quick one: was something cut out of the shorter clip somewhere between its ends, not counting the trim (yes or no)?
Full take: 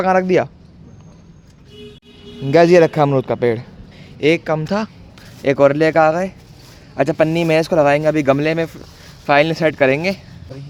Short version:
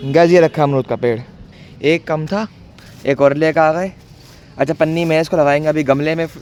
no